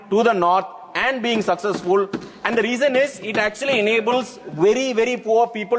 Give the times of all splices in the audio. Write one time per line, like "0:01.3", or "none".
none